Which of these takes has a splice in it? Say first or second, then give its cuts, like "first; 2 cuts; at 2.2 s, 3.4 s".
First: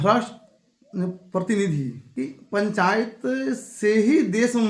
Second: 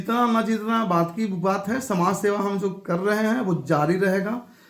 first; 1 cut; at 2.0 s